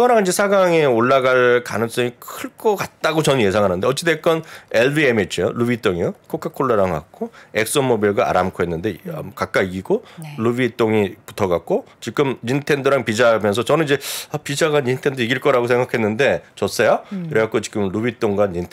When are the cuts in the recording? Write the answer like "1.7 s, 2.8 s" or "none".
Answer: none